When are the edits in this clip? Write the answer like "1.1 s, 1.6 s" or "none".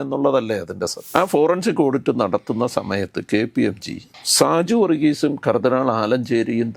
1.0 s